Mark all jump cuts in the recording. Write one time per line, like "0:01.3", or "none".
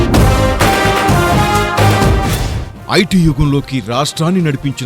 0:01.7